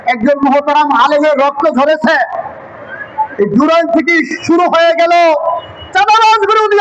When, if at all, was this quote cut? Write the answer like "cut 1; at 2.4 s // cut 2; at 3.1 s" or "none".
none